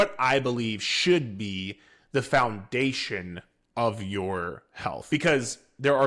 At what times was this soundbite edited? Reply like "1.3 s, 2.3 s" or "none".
4.9 s